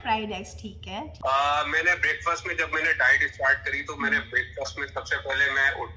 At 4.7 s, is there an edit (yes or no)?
no